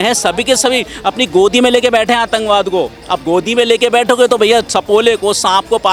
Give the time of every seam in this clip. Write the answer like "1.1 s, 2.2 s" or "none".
none